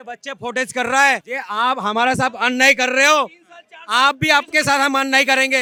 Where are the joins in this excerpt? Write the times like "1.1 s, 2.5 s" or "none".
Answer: none